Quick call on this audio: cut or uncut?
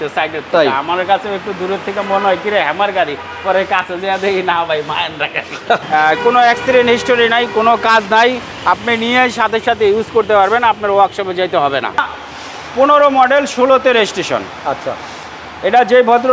cut